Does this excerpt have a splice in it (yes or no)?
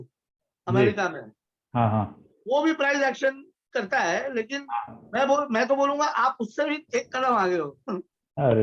no